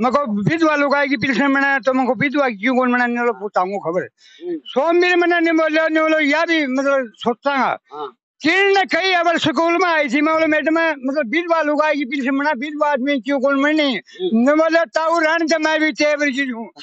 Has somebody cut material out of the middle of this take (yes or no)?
no